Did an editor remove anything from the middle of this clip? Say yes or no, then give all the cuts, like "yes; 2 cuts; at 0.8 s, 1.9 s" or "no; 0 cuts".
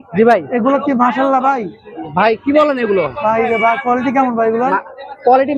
no; 0 cuts